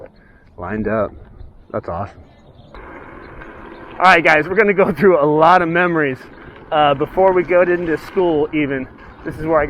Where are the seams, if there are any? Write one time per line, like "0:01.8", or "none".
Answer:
0:02.8